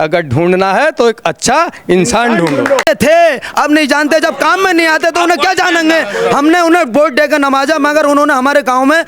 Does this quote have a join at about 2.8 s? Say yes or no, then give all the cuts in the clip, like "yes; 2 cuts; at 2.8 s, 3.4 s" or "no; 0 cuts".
yes; 1 cut; at 2.8 s